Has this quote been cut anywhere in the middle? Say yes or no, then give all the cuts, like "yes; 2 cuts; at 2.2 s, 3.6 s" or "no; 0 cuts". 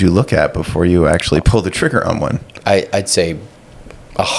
no; 0 cuts